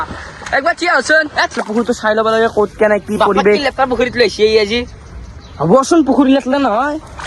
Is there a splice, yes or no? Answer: yes